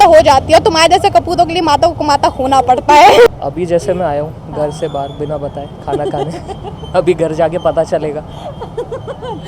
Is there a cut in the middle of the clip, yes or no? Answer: yes